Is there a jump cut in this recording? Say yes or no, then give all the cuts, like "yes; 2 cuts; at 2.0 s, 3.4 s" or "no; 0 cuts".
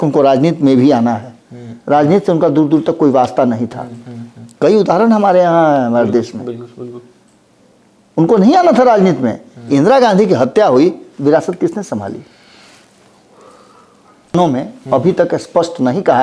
yes; 1 cut; at 14.3 s